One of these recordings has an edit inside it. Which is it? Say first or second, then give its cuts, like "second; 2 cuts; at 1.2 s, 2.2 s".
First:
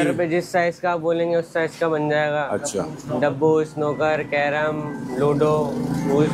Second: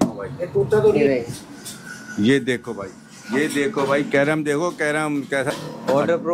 second; 2 cuts; at 1.0 s, 5.5 s